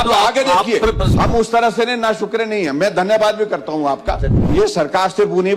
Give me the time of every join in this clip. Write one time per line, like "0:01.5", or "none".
0:01.1
0:04.4